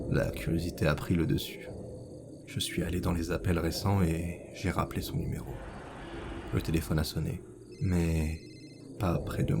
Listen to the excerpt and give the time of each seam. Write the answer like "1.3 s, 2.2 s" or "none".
1.4 s